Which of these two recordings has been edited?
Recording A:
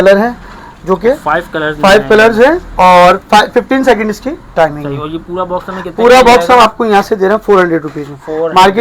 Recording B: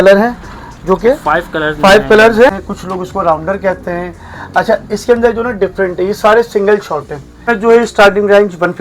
B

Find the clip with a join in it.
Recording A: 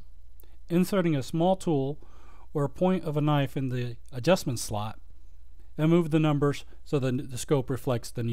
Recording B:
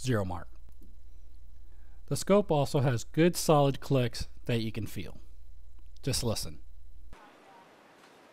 B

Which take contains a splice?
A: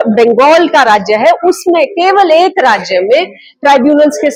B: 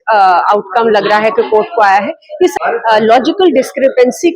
B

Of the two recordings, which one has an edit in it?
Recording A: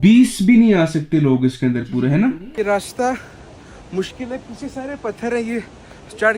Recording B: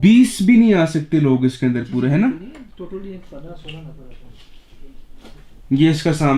A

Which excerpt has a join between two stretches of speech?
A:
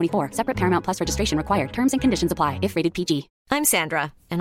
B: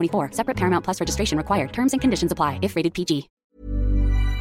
B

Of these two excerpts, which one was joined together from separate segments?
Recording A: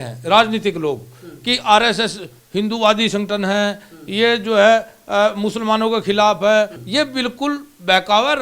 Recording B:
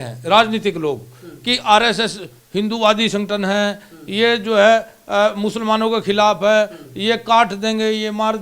A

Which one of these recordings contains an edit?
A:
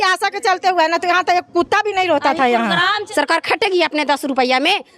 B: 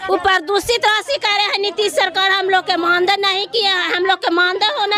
A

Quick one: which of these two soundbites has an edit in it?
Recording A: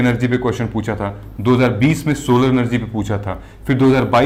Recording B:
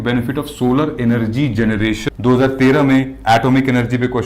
B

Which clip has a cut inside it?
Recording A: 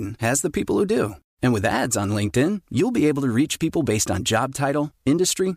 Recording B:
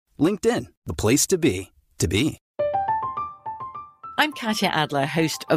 B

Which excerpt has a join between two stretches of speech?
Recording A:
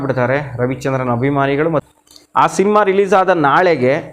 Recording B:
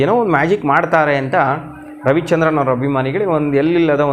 A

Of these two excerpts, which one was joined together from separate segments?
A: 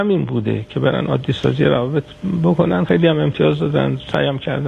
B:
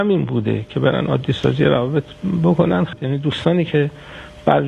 B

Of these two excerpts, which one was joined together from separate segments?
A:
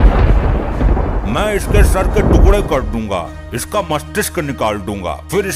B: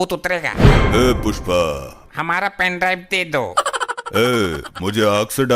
B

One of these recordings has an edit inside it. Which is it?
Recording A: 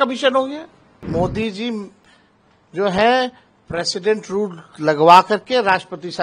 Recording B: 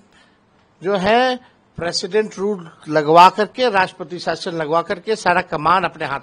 A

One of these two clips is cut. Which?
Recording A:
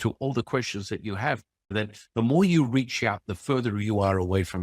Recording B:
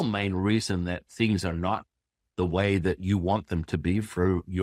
A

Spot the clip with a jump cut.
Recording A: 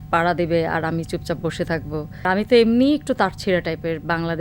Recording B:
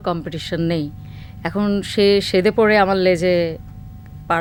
A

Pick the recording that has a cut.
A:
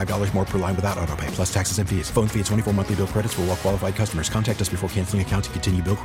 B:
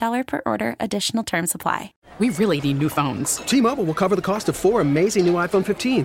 B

